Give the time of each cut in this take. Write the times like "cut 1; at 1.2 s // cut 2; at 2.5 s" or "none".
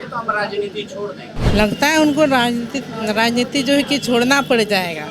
cut 1; at 1.4 s